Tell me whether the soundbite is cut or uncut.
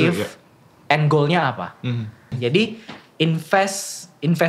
cut